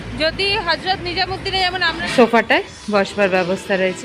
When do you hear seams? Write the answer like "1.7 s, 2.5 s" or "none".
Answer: 1.9 s